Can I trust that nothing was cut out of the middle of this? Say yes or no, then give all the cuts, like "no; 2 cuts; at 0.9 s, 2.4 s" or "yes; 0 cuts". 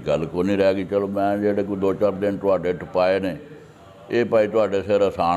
yes; 0 cuts